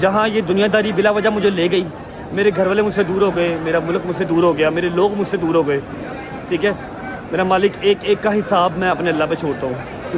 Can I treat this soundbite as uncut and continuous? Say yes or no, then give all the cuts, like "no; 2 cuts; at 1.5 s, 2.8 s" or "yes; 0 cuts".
yes; 0 cuts